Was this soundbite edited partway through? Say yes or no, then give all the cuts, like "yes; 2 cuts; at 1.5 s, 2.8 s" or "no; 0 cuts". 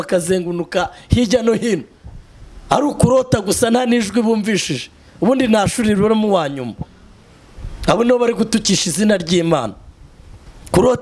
no; 0 cuts